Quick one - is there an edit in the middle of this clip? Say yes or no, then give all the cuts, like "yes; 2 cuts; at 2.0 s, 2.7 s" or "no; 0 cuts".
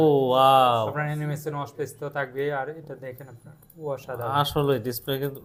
no; 0 cuts